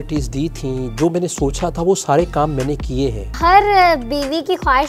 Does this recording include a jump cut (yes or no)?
yes